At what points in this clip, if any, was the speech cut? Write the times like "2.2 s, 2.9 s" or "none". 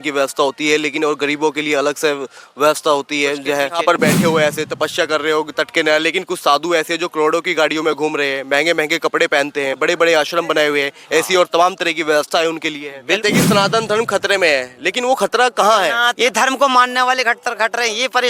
4.0 s, 13.2 s, 16.1 s